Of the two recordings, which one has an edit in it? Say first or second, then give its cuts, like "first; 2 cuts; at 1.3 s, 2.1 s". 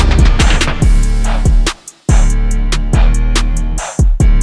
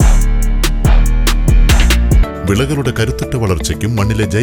second; 1 cut; at 2.2 s